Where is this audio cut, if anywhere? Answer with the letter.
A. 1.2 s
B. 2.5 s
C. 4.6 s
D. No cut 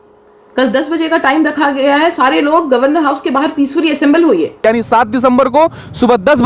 C